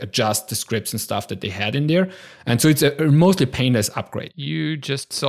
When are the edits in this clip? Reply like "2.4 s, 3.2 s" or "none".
none